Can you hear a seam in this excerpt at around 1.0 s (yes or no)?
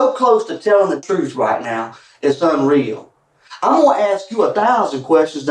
yes